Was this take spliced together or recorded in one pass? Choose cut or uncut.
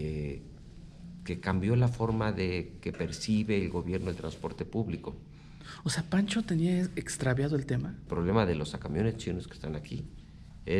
cut